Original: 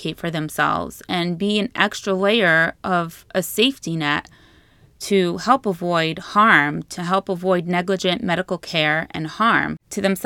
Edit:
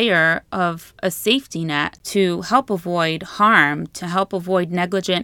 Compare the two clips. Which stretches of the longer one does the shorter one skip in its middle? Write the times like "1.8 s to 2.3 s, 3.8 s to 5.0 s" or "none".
4.3 s to 4.9 s